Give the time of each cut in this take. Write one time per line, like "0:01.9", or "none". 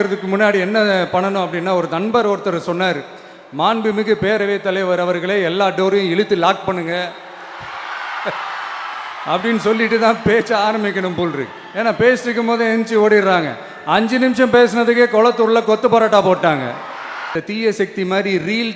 0:17.2